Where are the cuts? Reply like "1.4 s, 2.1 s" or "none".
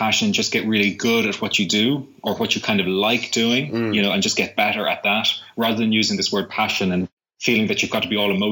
7.2 s